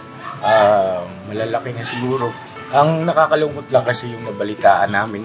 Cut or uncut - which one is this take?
cut